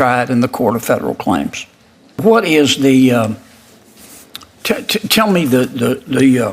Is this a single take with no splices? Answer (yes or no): no